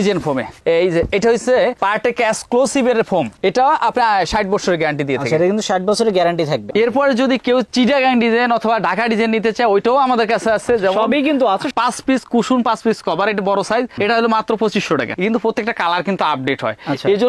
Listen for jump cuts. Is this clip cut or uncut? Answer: cut